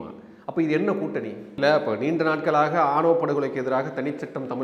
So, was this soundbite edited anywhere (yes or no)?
yes